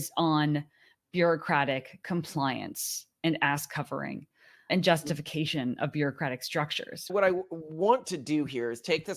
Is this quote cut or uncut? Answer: cut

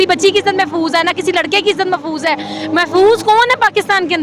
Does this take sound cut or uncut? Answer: uncut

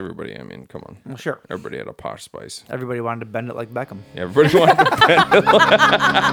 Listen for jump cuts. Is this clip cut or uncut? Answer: uncut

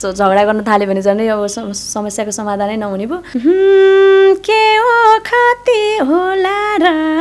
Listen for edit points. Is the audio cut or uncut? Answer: cut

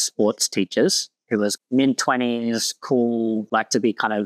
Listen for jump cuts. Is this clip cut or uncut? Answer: uncut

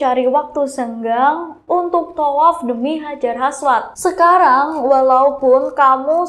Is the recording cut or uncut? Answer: cut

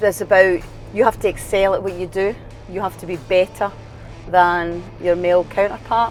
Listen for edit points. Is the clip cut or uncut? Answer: uncut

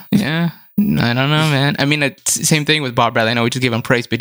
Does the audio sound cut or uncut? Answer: uncut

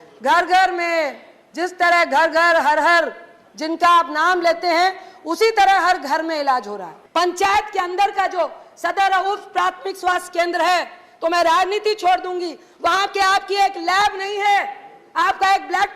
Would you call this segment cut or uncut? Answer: cut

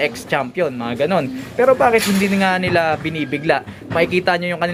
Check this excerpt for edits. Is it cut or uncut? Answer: uncut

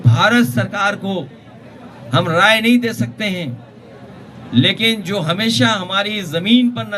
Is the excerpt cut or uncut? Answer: uncut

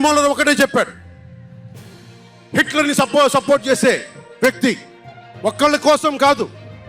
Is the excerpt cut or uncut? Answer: cut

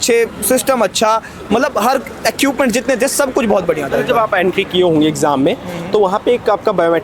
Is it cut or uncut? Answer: uncut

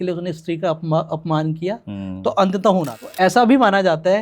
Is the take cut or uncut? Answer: cut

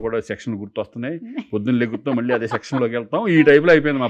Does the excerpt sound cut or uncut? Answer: uncut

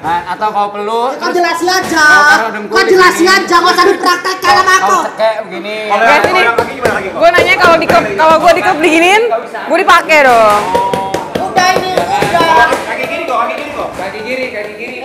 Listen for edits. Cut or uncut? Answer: uncut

